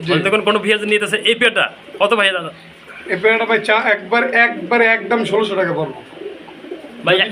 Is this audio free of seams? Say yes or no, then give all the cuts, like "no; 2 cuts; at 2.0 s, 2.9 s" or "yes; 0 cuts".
yes; 0 cuts